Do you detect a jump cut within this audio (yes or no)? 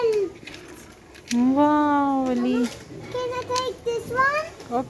no